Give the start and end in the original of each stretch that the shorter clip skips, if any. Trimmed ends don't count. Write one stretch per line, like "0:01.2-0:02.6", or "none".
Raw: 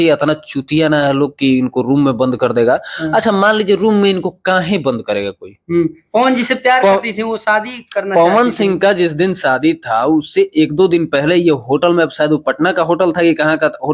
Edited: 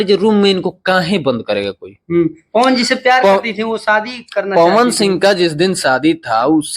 none